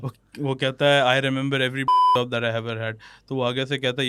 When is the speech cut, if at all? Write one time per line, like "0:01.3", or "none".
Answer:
none